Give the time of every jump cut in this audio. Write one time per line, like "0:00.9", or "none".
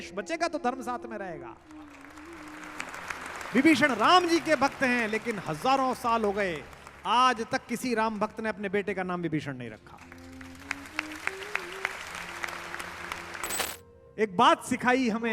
0:13.6